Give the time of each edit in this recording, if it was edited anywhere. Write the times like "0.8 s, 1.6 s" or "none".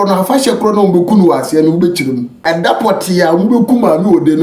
2.4 s